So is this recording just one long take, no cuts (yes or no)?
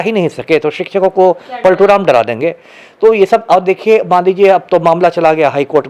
yes